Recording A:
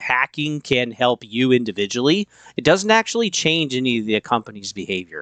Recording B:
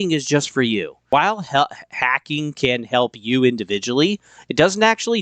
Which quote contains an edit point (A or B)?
B